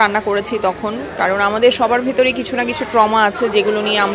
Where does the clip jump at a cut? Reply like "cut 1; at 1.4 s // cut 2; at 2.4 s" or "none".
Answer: none

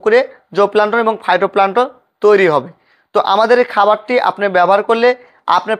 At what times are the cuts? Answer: none

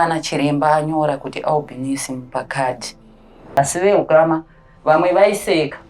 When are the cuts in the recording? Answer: cut 1; at 3.6 s

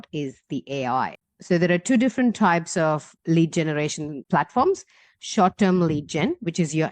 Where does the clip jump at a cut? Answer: cut 1; at 1.2 s

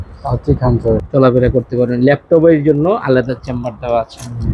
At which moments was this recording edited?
cut 1; at 1.0 s

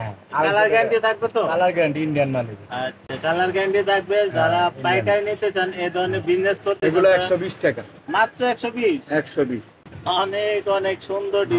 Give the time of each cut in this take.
none

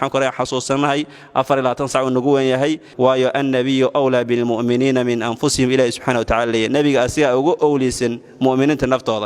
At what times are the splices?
cut 1; at 2.9 s

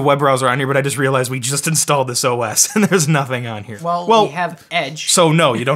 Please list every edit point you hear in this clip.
cut 1; at 3.7 s

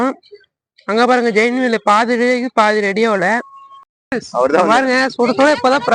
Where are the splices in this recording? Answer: cut 1; at 4.1 s

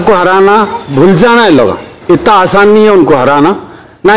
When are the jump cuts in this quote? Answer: cut 1; at 1.9 s

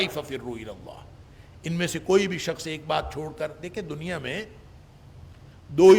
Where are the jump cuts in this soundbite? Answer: none

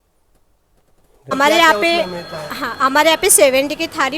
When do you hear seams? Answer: cut 1; at 1.3 s

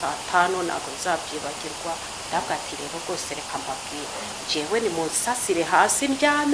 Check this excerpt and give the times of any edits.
cut 1; at 2.1 s

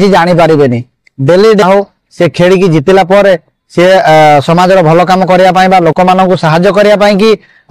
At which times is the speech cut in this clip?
cut 1; at 1.6 s

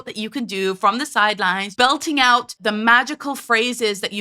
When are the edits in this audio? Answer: cut 1; at 1.7 s // cut 2; at 2.5 s

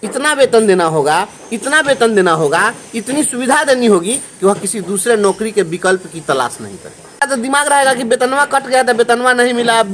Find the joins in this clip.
cut 1; at 7.2 s

